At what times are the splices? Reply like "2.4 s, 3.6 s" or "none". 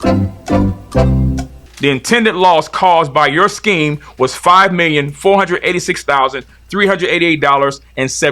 1.5 s